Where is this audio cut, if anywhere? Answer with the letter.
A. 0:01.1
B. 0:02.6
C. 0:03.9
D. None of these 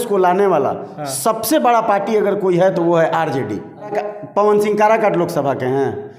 C